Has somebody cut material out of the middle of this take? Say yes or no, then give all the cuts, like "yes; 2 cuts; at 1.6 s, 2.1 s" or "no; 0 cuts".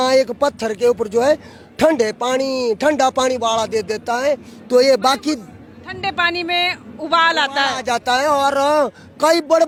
no; 0 cuts